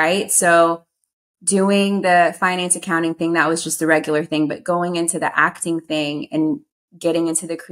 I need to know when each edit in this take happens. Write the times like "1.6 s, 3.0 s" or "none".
none